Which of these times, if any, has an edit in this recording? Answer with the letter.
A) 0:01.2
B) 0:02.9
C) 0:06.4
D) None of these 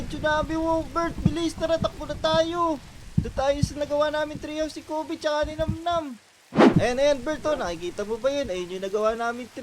D